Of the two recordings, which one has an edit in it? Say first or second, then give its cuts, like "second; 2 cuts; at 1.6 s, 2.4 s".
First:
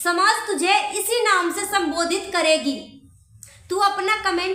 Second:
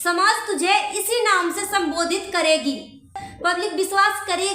second; 1 cut; at 3.2 s